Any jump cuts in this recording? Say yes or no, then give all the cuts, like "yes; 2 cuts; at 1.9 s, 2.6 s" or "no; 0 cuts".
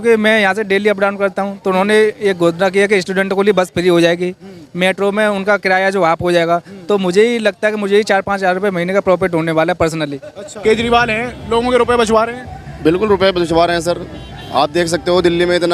yes; 1 cut; at 10.6 s